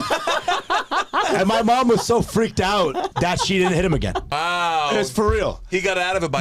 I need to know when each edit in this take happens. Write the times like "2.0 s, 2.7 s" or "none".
1.3 s, 3.1 s, 4.3 s

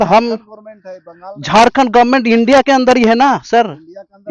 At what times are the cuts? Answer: none

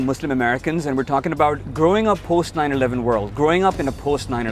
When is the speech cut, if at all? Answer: 1.1 s

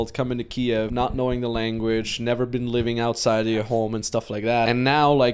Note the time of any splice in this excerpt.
1.2 s, 4.7 s

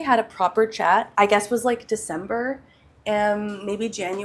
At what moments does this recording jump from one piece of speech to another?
1.1 s

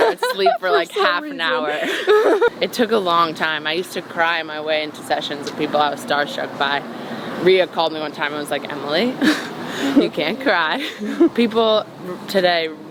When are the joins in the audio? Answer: 2.5 s, 11.3 s

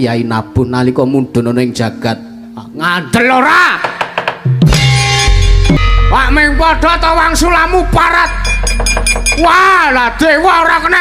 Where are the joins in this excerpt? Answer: none

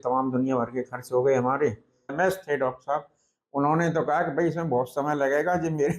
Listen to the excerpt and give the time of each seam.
2.1 s

